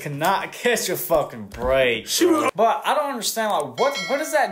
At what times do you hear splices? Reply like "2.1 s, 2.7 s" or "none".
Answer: 2.5 s